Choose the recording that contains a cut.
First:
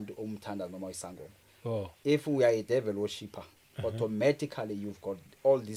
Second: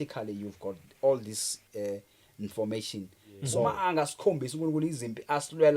second; 1 cut; at 3.6 s

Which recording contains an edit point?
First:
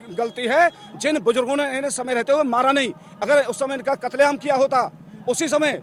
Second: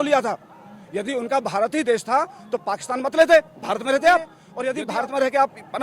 second; 1 cut; at 4.4 s

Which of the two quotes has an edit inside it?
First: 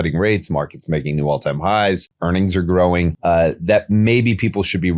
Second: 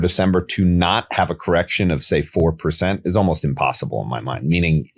first; 2 cuts; at 2.1 s, 3.1 s

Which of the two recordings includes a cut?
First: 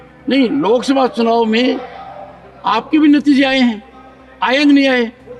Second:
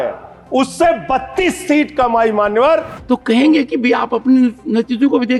second; 1 cut; at 2.9 s

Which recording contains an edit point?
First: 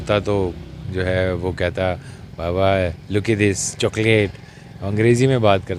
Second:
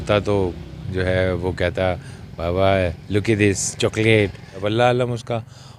second; 1 cut; at 4.6 s

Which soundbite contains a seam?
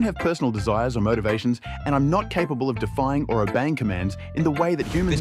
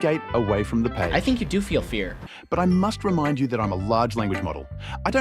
second; 1 cut; at 2.2 s

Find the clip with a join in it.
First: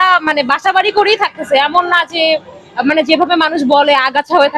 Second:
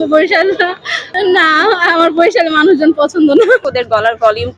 second; 2 cuts; at 1.1 s, 3.6 s

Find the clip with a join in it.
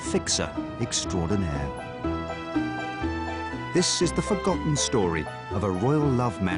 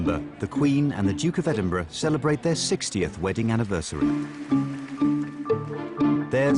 first; 1 cut; at 4.5 s

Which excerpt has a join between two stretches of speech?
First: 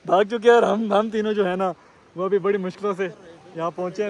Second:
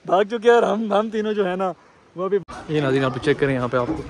second; 1 cut; at 2.4 s

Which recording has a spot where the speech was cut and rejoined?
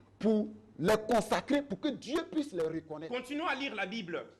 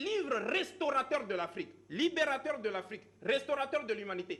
first; 1 cut; at 2.9 s

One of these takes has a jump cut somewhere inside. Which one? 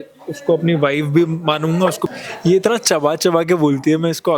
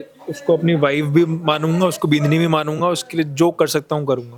first; 1 cut; at 2.0 s

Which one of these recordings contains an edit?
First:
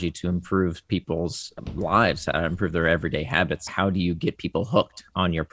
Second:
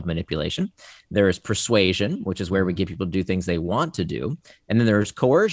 first; 2 cuts; at 1.5 s, 3.7 s

